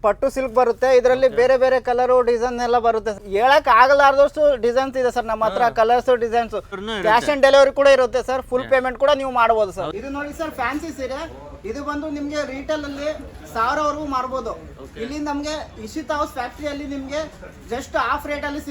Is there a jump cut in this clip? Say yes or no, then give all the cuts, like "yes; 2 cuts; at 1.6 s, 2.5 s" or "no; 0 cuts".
yes; 3 cuts; at 3.2 s, 6.8 s, 9.9 s